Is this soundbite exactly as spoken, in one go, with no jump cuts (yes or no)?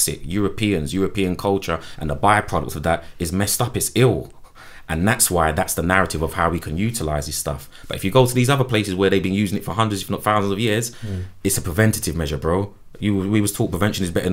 yes